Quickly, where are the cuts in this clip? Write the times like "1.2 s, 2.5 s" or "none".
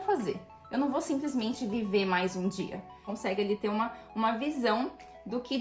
3.0 s